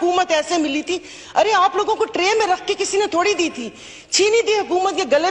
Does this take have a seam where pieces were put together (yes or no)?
no